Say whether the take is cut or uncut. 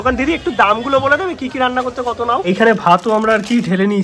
cut